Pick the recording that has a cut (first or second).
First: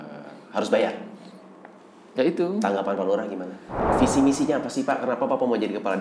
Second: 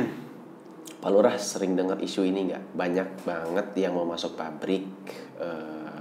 first